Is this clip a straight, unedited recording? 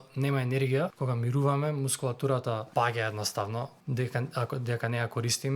no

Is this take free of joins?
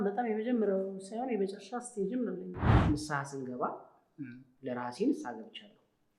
no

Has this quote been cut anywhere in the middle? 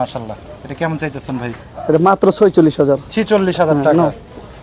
no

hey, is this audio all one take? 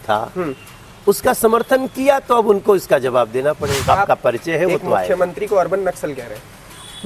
no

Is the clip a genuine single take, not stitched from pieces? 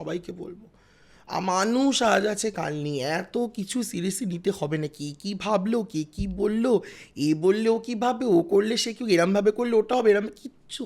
yes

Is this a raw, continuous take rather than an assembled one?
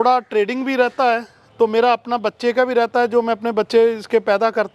yes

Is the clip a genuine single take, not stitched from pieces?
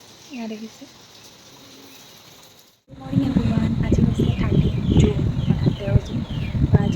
no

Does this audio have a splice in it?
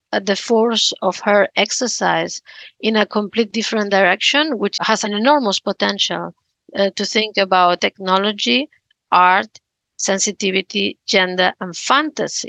yes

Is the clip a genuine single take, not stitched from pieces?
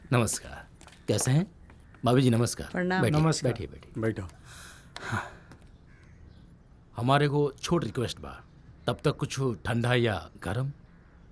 yes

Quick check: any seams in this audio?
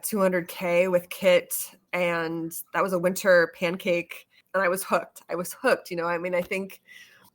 yes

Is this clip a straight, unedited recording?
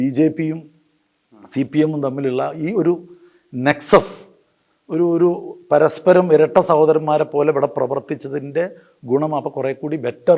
yes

